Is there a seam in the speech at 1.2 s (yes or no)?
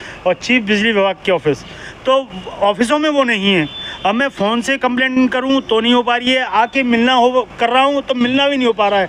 no